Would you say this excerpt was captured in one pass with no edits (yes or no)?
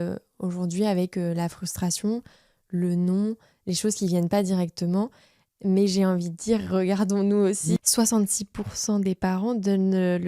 no